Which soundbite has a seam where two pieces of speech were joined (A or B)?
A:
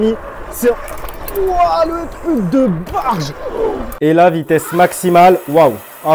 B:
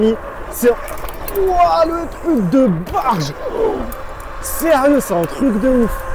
A